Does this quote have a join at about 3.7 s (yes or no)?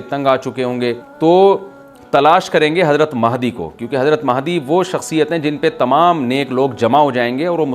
no